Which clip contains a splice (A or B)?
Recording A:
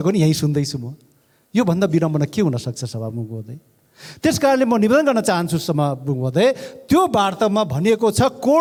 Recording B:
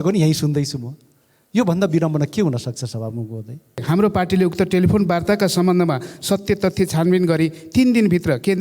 B